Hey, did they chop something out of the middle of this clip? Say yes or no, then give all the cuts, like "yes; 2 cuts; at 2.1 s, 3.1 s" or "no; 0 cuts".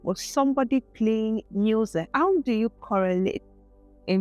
yes; 1 cut; at 1.9 s